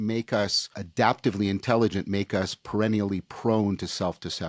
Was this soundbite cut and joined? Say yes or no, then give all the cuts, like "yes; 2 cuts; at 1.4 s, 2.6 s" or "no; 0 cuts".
no; 0 cuts